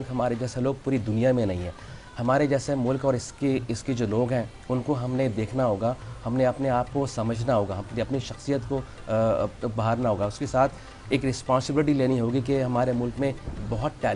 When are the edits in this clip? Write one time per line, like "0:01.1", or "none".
none